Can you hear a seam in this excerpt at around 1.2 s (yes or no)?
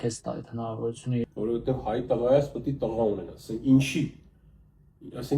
yes